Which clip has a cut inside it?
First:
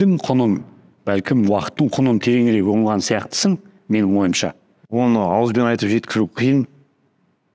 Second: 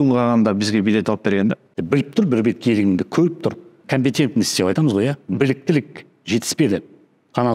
second; 1 cut; at 1.8 s

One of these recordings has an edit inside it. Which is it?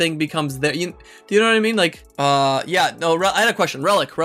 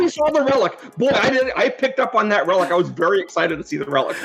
first; 1 cut; at 2.0 s

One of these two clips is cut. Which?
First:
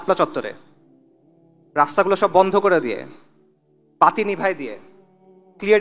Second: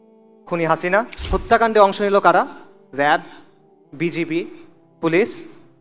second; 1 cut; at 1.2 s

